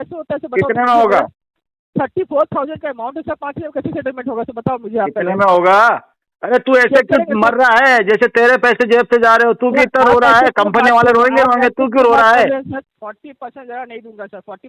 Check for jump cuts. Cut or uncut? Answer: cut